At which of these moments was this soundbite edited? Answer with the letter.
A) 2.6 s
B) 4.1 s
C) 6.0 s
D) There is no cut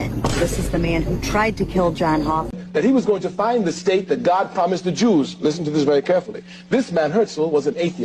A